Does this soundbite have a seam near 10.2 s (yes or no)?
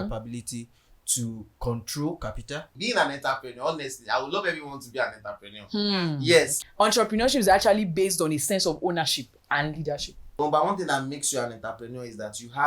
yes